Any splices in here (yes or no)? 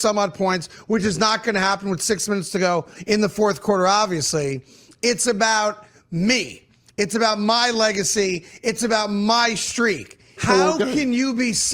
yes